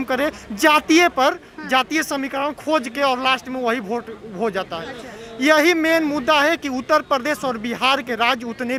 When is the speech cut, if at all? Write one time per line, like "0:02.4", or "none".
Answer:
none